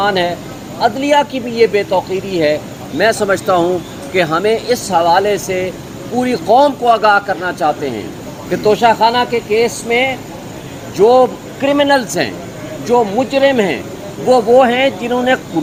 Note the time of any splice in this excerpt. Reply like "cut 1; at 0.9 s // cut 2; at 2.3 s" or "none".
none